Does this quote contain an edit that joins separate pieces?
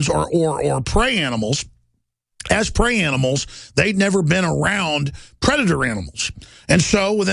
yes; 1 cut; at 5.6 s

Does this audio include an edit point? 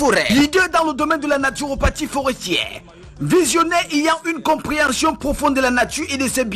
no; 0 cuts

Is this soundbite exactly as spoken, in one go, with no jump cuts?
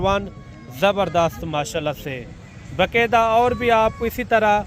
yes; 0 cuts

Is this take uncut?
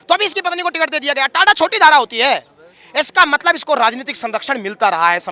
yes; 0 cuts

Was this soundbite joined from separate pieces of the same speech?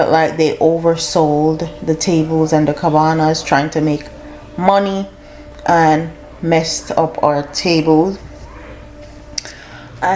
no; 0 cuts

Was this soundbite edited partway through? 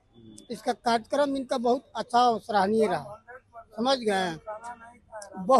no; 0 cuts

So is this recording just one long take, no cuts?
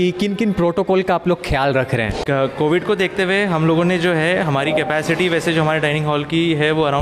yes; 0 cuts

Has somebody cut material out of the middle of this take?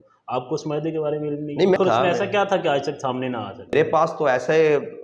yes; 2 cuts; at 1.8 s, 3.7 s

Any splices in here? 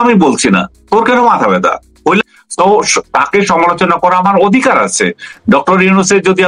yes; 1 cut; at 2.2 s

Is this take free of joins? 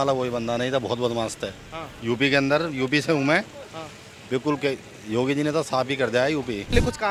yes; 0 cuts

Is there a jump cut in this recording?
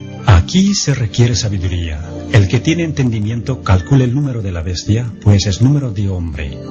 no; 0 cuts

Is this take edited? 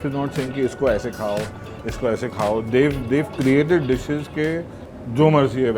no; 0 cuts

